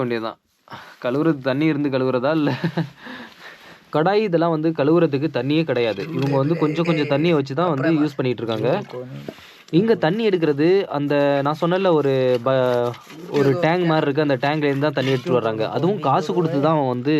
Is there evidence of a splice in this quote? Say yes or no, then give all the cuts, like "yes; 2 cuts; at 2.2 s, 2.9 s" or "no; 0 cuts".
yes; 1 cut; at 3.7 s